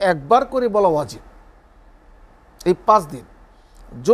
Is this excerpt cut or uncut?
uncut